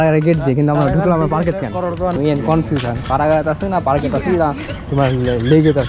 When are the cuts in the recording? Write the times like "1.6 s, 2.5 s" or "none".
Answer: 2.1 s